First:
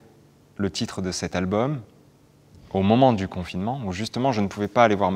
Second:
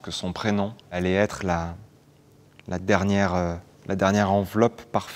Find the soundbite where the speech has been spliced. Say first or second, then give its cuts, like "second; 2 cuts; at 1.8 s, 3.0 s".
second; 1 cut; at 1.0 s